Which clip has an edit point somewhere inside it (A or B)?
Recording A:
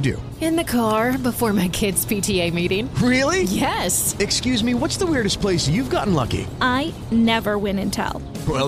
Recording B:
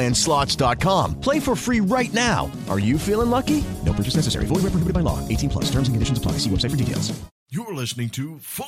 B